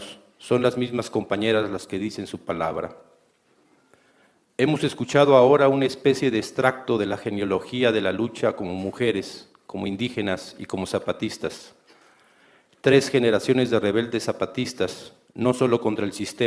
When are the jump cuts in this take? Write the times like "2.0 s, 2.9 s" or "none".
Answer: 3.7 s